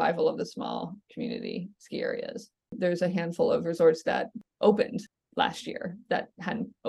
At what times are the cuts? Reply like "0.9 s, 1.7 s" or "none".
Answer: 2.7 s, 4.4 s, 5.2 s